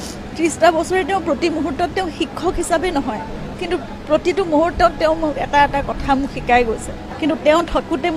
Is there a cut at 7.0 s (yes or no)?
yes